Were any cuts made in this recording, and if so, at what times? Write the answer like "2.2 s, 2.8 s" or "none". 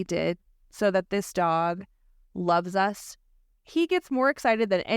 3.6 s